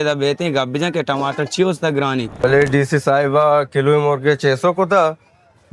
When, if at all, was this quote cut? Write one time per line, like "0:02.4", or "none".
0:02.3